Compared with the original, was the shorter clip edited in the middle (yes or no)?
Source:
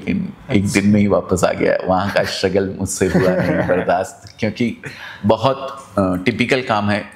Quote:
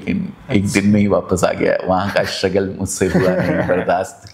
no